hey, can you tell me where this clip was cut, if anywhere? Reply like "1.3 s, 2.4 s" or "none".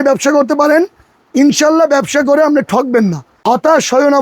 3.3 s

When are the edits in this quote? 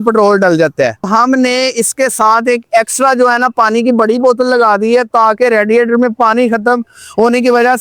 1.1 s

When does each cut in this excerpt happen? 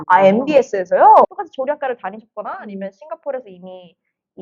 1.2 s

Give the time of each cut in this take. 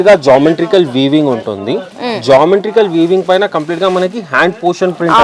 none

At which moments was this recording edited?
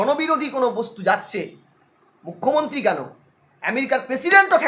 none

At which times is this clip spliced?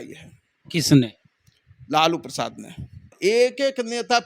3.1 s

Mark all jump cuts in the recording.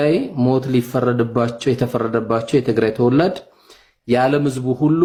none

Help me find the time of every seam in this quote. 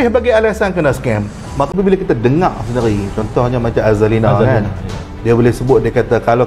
1.7 s

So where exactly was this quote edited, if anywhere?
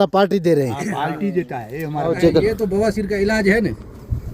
2.2 s

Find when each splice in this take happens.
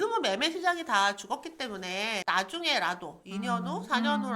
2.2 s

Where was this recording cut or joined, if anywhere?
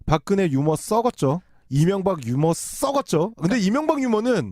3.4 s

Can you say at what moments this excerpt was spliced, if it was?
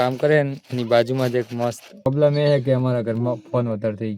2.1 s

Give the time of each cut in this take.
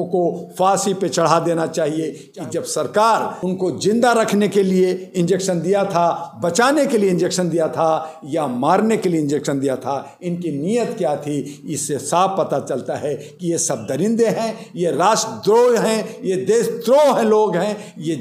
2.2 s, 3.3 s

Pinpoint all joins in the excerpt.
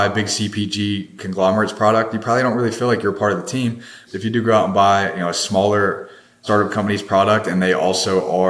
4.1 s, 6.4 s

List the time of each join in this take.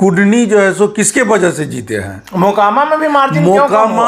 none

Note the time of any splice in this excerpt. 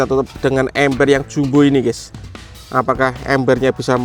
none

